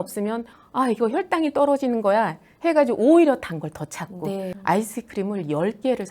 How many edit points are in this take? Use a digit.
1